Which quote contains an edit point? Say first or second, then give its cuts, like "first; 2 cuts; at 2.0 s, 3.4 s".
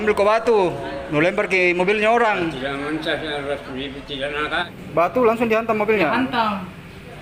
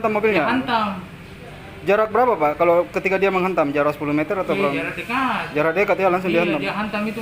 first; 1 cut; at 4.6 s